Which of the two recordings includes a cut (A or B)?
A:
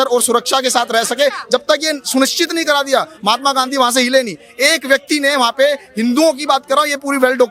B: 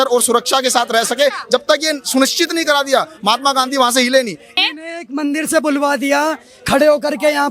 B